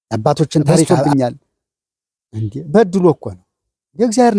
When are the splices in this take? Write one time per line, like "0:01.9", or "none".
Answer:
0:01.1